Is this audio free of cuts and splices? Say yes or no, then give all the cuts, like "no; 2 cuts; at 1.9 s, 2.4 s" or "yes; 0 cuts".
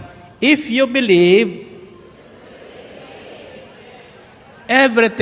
yes; 0 cuts